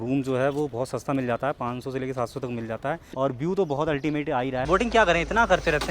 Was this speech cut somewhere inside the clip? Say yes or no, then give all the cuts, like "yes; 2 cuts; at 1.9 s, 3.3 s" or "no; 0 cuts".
yes; 2 cuts; at 3.1 s, 4.6 s